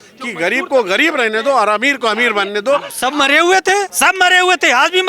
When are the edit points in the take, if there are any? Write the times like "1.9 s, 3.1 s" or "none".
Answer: 2.9 s, 3.9 s